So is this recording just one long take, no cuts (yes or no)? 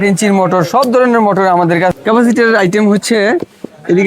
no